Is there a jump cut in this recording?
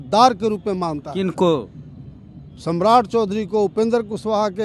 no; 0 cuts

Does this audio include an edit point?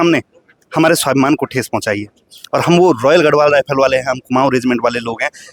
no; 0 cuts

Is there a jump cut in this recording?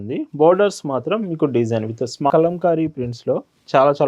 yes; 1 cut; at 2.3 s

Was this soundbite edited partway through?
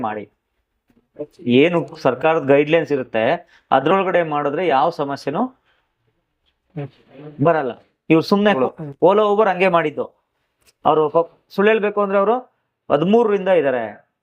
yes; 1 cut; at 8.6 s

